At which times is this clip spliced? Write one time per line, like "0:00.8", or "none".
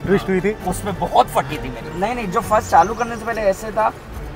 0:01.9